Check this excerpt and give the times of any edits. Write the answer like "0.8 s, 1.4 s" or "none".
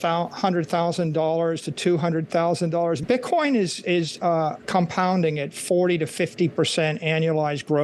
3.0 s